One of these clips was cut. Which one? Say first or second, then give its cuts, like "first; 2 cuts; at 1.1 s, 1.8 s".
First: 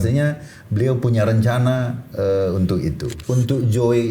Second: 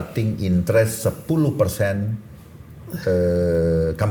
first; 1 cut; at 3.1 s